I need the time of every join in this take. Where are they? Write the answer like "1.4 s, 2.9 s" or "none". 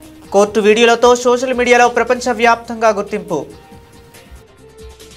3.6 s